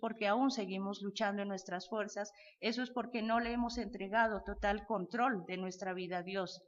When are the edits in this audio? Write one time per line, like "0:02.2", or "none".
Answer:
none